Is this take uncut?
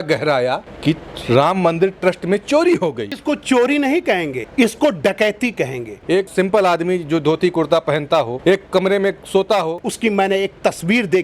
no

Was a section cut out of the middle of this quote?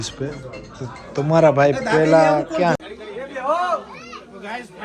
yes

